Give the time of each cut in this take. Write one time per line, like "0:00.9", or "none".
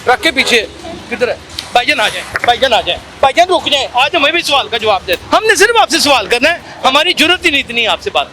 0:01.5
0:05.2